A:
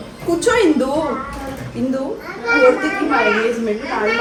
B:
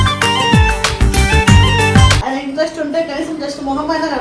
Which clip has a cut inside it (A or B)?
B